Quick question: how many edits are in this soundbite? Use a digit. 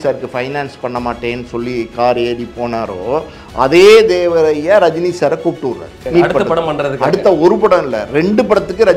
1